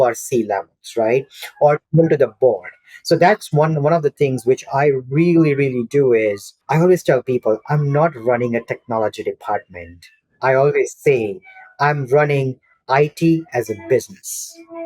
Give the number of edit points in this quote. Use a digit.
1